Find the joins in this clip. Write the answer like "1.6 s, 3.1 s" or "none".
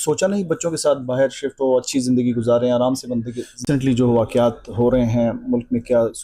3.6 s